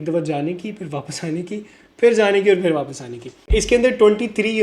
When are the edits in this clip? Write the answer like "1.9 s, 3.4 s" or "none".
3.4 s